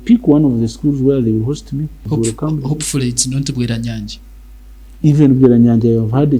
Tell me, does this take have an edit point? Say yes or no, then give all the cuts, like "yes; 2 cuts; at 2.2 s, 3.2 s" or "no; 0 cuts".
yes; 1 cut; at 2.1 s